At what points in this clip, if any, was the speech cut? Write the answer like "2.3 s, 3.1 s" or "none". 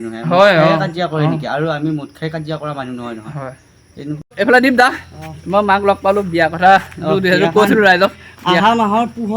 4.2 s